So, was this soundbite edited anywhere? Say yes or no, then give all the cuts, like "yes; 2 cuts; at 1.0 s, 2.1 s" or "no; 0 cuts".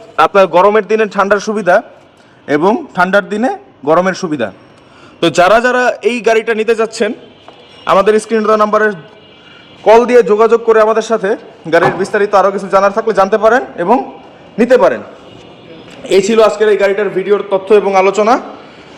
no; 0 cuts